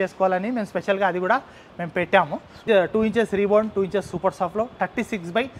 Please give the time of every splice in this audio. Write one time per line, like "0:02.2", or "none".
0:02.6